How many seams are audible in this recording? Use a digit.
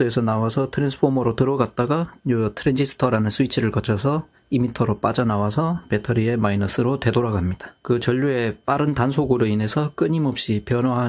2